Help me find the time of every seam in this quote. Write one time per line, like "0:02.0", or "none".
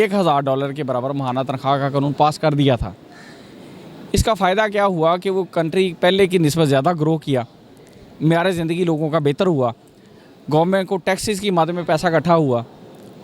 none

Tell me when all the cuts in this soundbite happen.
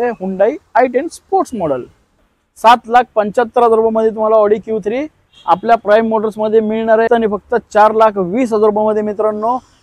0:02.1
0:07.1

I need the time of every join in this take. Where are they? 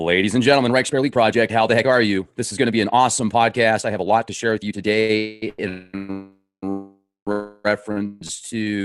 none

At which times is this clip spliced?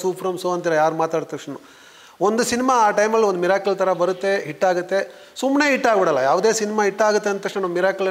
none

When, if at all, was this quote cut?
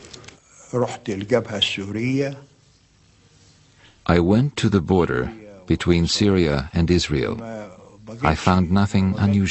0:07.5

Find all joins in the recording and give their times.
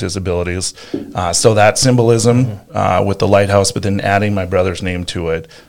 none

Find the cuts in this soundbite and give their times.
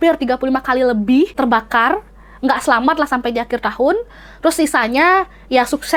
0:01.3

